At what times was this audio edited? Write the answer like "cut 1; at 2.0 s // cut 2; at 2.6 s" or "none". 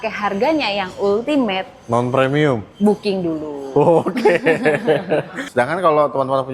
cut 1; at 5.4 s